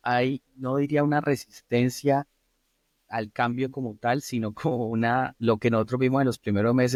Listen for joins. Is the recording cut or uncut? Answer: uncut